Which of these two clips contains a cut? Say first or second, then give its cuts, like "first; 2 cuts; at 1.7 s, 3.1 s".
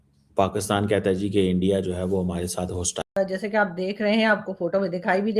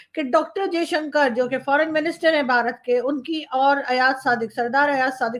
first; 1 cut; at 3.0 s